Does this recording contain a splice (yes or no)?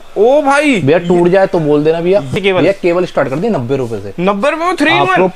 yes